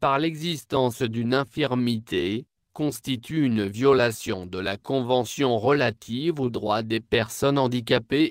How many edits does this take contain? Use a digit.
0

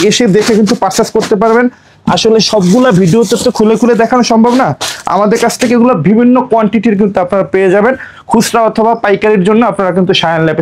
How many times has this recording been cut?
0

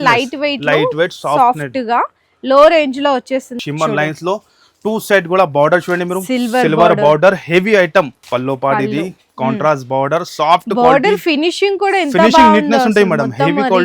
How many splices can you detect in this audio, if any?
2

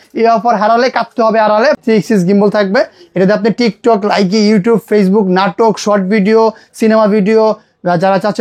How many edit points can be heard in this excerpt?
1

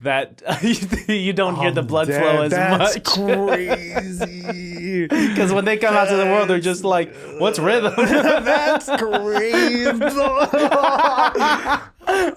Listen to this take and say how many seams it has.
0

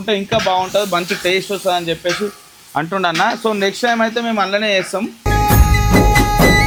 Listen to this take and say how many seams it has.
0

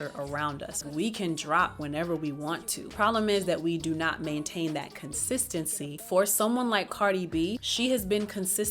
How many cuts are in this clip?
4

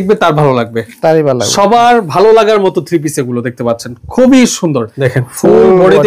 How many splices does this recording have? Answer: 1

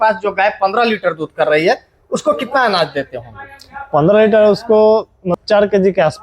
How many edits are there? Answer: 1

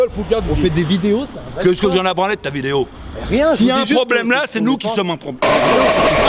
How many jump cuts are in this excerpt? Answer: 0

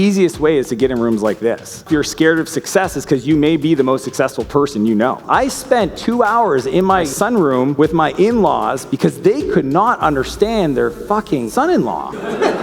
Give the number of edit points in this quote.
3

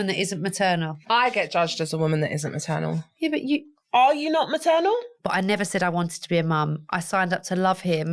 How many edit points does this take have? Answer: 2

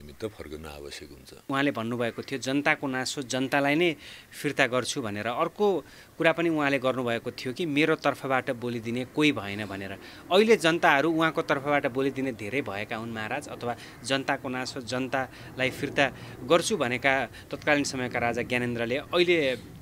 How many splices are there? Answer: 1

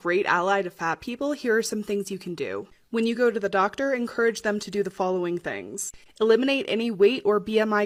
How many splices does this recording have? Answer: 0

